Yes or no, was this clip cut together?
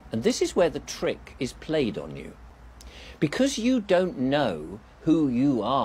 no